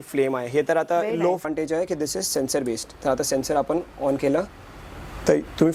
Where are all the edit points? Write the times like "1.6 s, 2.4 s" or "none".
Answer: 1.4 s